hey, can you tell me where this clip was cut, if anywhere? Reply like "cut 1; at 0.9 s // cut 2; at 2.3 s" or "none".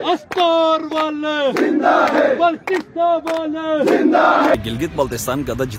cut 1; at 4.6 s

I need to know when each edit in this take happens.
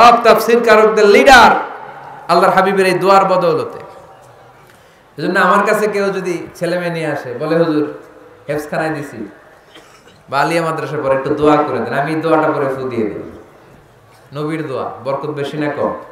none

